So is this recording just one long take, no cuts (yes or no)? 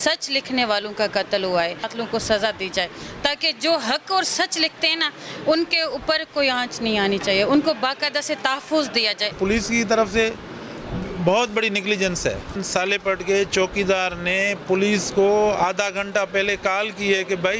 no